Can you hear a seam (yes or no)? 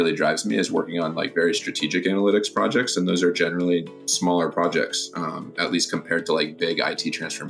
no